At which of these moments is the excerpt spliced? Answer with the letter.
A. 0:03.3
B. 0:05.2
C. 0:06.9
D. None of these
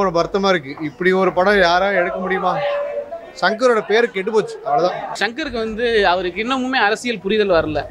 B